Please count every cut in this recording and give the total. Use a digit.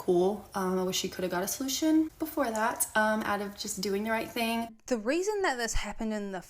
2